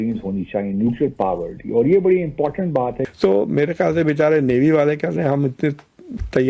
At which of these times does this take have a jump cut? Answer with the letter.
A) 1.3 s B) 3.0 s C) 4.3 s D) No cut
B